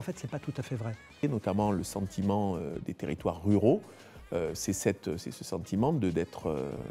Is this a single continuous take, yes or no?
no